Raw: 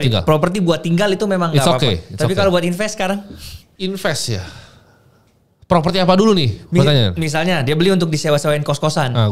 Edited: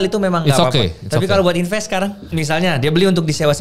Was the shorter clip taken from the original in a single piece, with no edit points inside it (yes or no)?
no